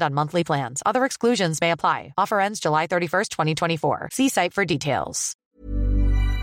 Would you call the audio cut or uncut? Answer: cut